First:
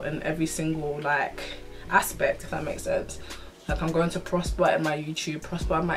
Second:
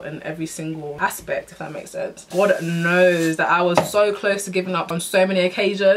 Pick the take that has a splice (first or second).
second